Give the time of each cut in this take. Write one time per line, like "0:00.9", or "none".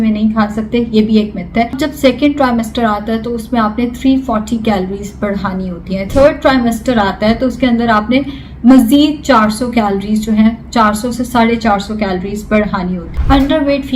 0:01.8
0:06.1
0:13.1